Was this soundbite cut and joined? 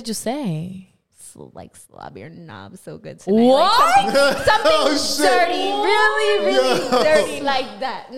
no; 0 cuts

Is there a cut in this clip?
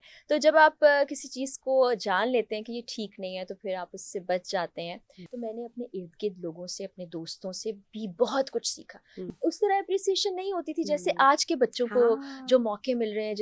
yes; 2 cuts; at 5.2 s, 9.2 s

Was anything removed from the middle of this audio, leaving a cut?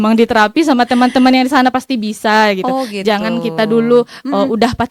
no; 0 cuts

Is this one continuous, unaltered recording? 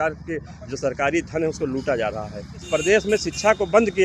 no; 1 cut; at 2.7 s

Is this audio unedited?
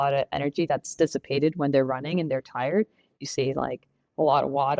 yes; 0 cuts

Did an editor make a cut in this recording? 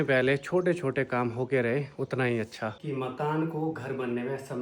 yes; 1 cut; at 2.8 s

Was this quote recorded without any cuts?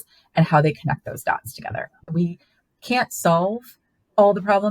no; 1 cut; at 2.1 s

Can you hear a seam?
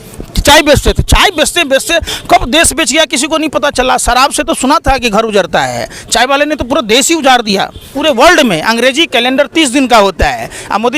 yes; 1 cut; at 7.9 s

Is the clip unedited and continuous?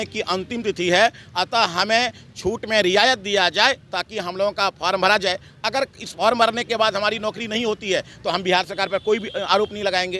yes; 0 cuts

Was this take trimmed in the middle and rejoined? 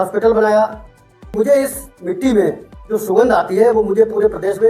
yes; 1 cut; at 1.3 s

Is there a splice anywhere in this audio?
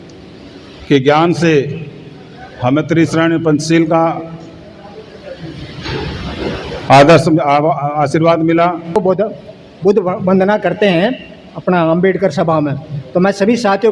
yes; 1 cut; at 9.0 s

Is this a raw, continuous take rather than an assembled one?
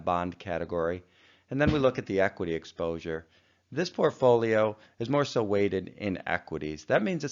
no; 1 cut; at 3.1 s

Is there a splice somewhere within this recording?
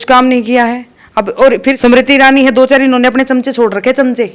yes; 1 cut; at 1.8 s

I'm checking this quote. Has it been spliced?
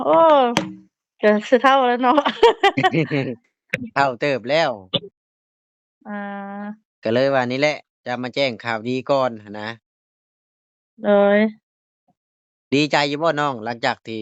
no; 0 cuts

